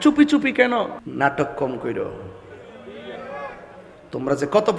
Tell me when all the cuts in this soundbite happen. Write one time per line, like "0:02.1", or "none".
0:01.0